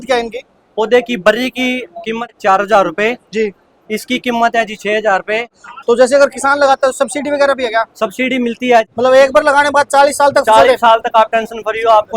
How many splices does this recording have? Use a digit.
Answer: 3